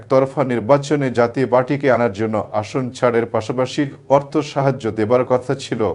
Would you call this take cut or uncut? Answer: uncut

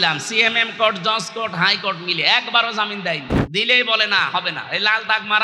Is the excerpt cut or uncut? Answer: cut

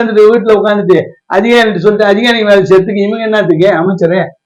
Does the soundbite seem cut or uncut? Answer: uncut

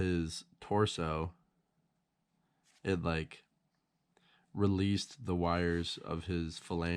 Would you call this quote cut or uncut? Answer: uncut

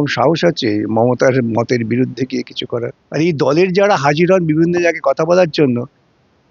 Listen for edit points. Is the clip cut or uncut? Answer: cut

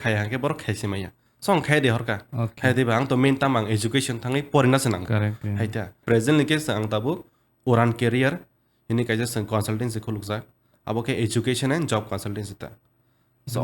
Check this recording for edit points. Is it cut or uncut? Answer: cut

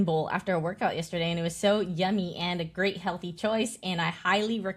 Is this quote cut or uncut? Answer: uncut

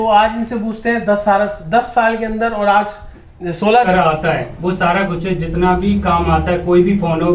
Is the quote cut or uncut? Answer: cut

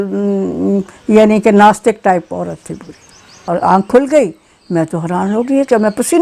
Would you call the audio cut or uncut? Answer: cut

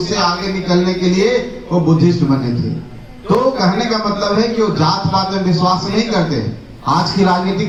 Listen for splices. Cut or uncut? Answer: uncut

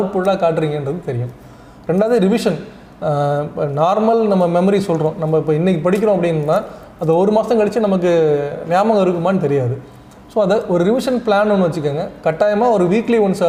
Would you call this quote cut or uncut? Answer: uncut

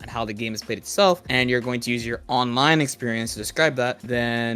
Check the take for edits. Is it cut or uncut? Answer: uncut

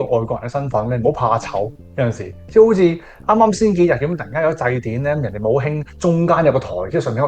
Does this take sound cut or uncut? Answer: uncut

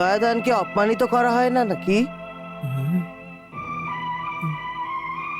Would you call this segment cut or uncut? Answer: uncut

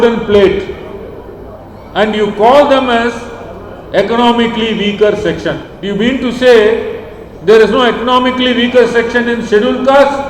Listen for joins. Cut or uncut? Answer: cut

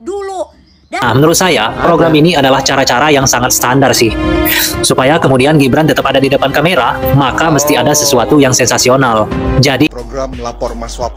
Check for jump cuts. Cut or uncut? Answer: cut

